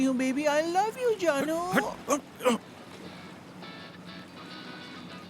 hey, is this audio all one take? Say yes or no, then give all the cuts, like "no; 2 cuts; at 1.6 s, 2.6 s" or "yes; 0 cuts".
yes; 0 cuts